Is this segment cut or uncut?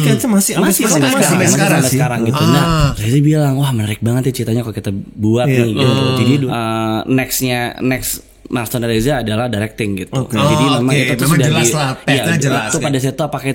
cut